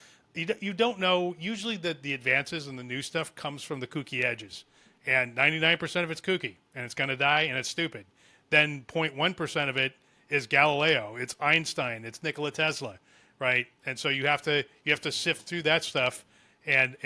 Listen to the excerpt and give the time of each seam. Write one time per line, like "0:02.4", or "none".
none